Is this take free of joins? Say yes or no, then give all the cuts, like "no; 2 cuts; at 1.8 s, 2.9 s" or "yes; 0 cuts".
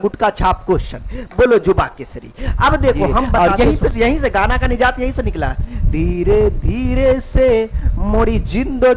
no; 1 cut; at 3.4 s